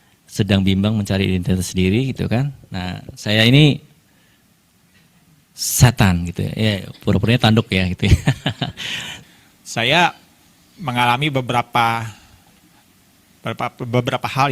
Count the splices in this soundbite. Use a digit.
1